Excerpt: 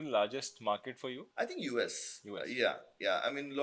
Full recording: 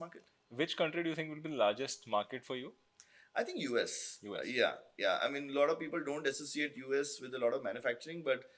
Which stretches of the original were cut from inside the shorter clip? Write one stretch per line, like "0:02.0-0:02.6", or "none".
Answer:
0:02.7-0:03.2